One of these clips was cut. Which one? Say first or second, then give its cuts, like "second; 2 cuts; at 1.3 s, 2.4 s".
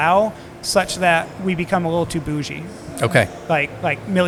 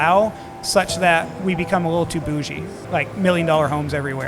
second; 1 cut; at 2.8 s